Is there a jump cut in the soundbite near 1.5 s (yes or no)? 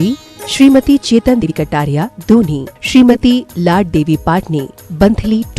yes